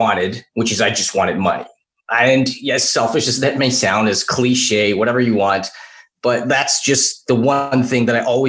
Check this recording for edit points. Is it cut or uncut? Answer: uncut